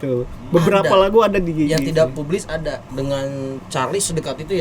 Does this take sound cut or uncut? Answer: cut